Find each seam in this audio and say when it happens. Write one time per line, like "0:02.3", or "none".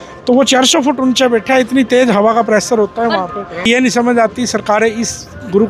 0:03.7